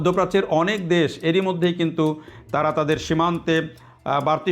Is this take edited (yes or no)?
no